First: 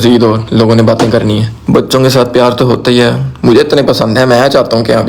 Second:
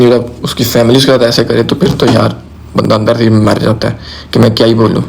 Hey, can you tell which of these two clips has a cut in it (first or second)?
first